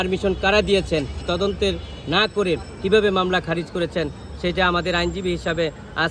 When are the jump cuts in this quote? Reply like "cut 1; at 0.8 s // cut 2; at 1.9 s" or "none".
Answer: cut 1; at 1.2 s